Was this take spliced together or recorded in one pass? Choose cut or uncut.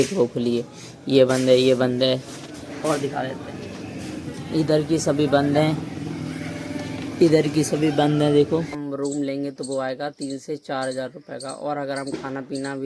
cut